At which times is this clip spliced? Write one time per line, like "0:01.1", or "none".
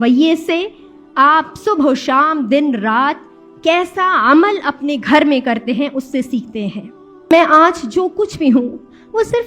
0:07.1